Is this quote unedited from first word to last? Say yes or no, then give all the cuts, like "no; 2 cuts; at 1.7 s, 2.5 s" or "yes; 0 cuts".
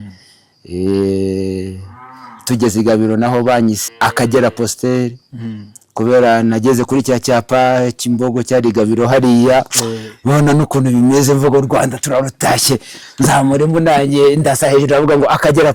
no; 1 cut; at 3.9 s